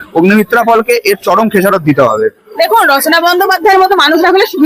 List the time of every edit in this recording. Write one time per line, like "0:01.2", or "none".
0:02.6